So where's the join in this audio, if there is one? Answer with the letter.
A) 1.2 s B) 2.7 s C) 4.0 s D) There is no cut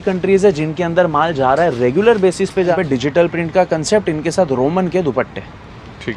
B